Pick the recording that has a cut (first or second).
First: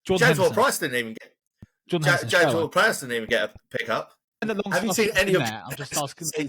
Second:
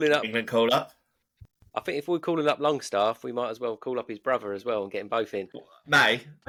first